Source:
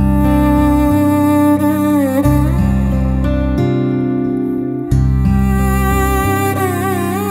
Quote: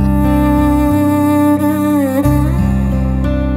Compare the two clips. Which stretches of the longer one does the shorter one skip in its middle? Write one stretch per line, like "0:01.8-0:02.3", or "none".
none